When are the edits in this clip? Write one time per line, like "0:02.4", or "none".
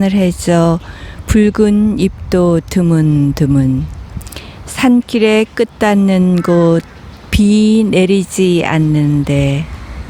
none